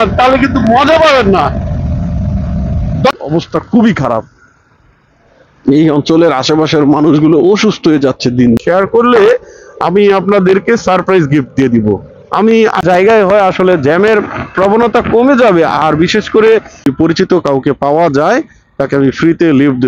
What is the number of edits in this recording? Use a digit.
4